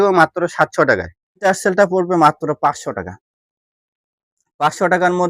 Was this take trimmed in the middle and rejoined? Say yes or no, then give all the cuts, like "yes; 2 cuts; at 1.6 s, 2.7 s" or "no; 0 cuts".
yes; 1 cut; at 1.5 s